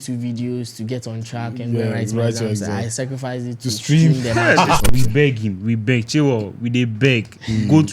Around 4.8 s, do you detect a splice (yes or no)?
yes